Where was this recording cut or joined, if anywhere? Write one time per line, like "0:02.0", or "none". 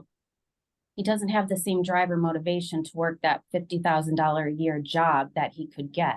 none

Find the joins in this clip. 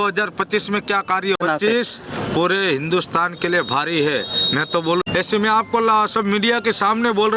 0:01.4
0:05.1

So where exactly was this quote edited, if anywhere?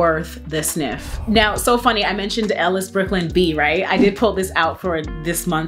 none

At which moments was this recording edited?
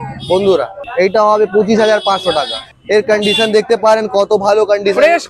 0:00.8
0:02.7

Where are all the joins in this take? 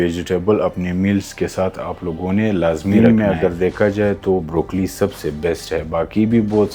0:02.9

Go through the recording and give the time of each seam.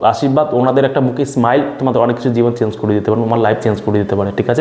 none

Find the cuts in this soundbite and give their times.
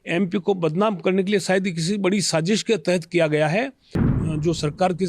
0:04.2

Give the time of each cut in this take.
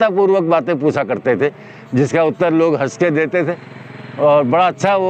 none

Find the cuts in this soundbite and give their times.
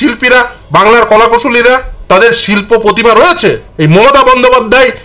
0:01.9
0:03.7

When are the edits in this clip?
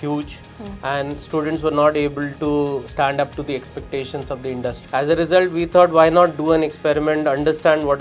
0:02.9
0:04.8

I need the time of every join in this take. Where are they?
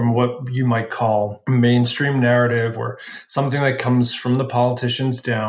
0:01.4

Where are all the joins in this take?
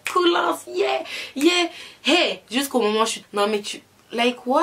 0:03.2

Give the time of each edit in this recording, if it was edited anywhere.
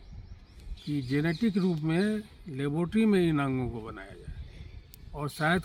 none

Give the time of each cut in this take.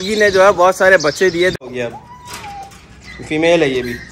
0:01.5

